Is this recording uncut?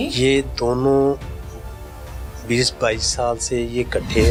yes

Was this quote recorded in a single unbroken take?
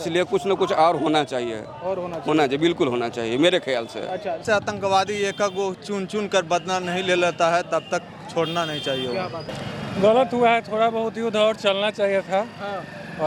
no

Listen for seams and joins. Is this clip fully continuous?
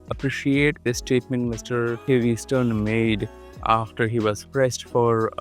yes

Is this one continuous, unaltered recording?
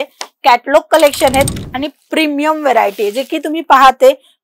yes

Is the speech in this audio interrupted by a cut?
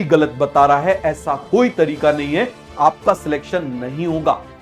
yes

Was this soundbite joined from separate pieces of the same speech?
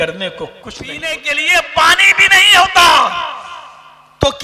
yes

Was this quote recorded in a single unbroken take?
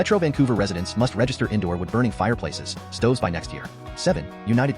no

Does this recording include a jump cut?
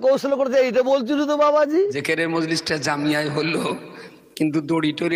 yes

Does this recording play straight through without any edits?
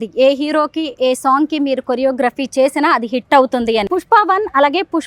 no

